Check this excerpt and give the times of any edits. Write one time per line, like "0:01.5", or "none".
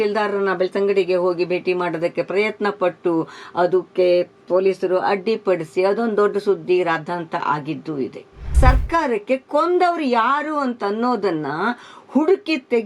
0:08.6